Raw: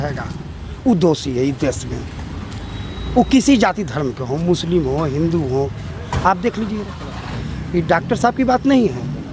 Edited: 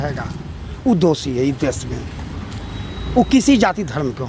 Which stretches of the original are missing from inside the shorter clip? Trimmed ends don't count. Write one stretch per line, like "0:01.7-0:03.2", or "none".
none